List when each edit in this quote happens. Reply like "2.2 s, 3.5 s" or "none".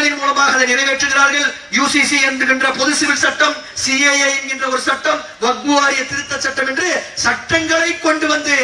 none